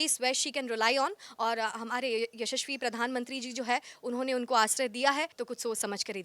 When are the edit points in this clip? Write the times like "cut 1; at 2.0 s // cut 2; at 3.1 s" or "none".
cut 1; at 5.3 s